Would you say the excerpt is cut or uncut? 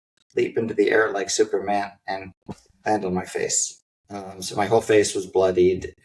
cut